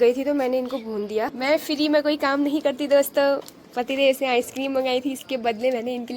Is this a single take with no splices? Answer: no; 1 cut; at 1.3 s

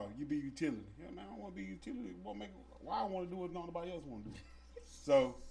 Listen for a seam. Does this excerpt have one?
no; 0 cuts

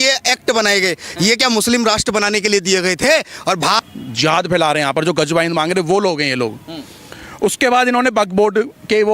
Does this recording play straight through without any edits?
no; 1 cut; at 3.8 s

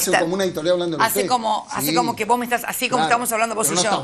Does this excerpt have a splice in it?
no; 0 cuts

